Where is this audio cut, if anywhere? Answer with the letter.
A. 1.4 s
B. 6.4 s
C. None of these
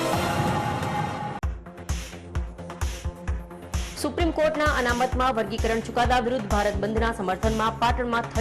A